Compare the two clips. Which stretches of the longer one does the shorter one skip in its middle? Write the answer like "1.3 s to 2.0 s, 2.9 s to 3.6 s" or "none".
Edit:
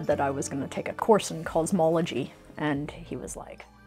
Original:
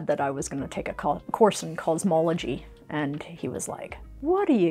0.9 s to 1.2 s

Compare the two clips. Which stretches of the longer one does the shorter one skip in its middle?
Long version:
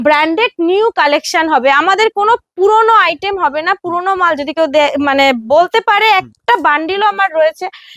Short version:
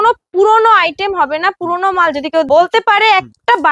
4.7 s to 5.5 s

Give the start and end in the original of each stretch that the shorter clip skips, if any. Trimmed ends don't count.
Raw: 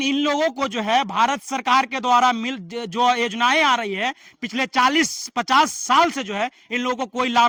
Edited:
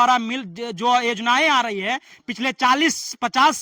none

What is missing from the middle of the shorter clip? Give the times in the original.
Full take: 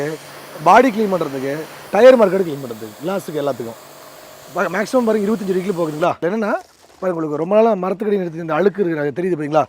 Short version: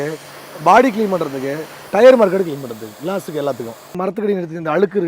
4.0 s to 7.8 s

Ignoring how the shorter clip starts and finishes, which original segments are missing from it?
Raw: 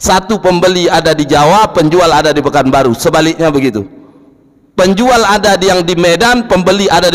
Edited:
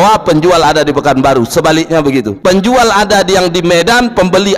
3.8 s to 4.7 s

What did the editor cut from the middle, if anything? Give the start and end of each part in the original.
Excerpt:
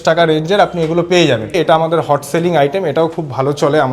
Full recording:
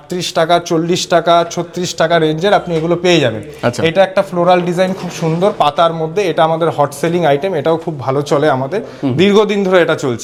3.5 s to 6.2 s

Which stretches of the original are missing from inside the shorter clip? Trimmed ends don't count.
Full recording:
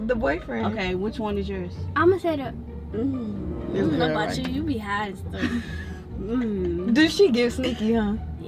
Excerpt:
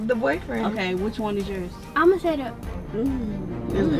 none

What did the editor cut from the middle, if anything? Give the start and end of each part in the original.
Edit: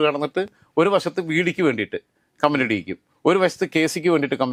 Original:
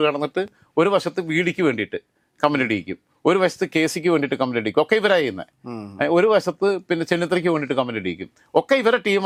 none

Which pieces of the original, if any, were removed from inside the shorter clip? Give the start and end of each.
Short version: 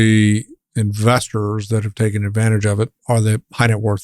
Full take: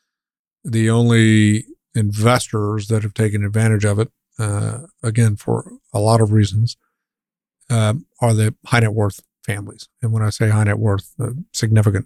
4.2 s to 8.1 s

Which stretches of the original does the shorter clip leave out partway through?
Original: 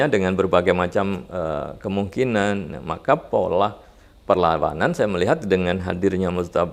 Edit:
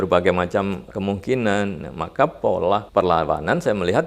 1.3 s to 1.7 s, 3.7 s to 4.2 s

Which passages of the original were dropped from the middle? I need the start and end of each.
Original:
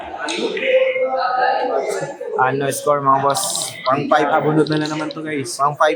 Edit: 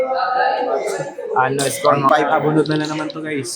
3.0 s to 4.0 s

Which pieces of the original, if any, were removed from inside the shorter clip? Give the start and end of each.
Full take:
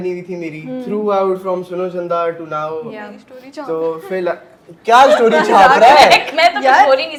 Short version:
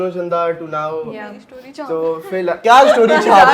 4.4 s to 4.8 s

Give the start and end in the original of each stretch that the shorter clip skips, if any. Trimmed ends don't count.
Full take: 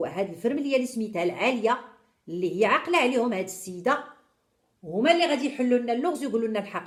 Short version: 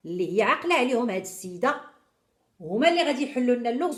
none

